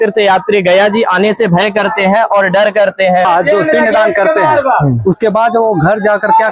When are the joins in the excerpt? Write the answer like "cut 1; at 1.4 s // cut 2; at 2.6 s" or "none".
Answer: cut 1; at 3.3 s